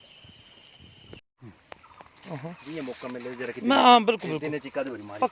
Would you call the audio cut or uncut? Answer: cut